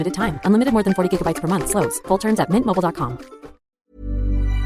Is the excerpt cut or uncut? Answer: cut